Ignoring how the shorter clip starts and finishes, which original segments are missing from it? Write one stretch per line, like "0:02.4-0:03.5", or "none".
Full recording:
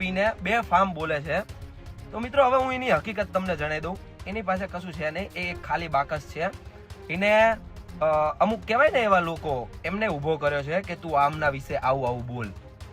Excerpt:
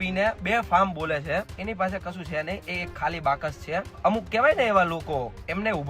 0:01.6-0:04.3
0:06.7-0:08.3